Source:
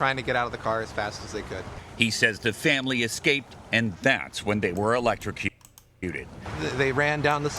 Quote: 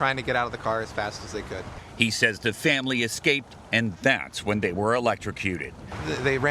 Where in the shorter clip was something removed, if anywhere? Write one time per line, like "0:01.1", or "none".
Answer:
0:05.4